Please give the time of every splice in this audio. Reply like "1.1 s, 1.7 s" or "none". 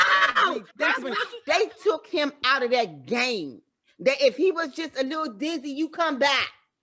1.0 s